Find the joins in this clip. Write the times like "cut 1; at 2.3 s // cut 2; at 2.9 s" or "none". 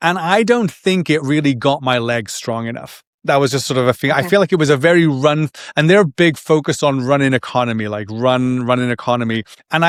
none